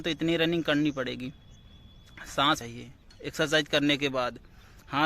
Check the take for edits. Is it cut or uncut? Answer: cut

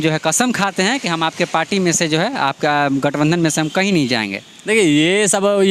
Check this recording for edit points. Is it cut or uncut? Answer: uncut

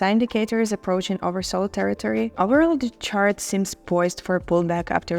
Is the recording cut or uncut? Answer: cut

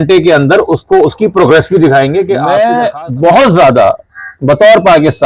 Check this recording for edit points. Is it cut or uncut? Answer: cut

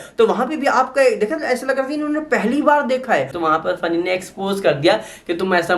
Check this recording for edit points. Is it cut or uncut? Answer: cut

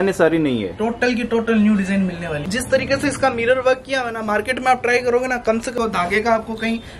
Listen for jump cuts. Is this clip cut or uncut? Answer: cut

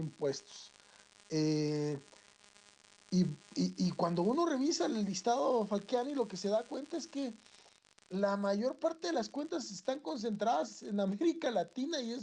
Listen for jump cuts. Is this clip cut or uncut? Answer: cut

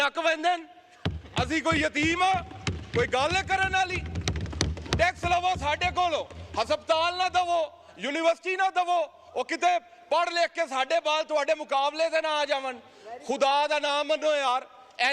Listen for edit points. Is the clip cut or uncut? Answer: uncut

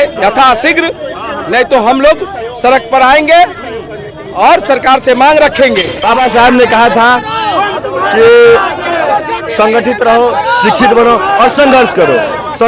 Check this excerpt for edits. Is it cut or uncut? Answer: cut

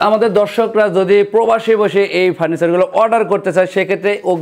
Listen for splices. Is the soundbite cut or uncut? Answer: uncut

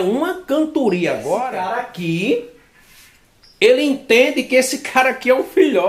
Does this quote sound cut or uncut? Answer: cut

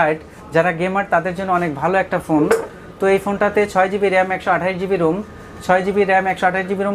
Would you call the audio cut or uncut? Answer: uncut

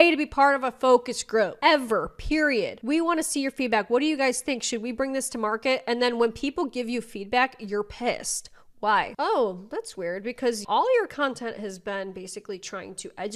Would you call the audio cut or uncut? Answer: cut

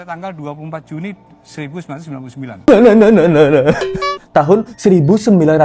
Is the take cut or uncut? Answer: cut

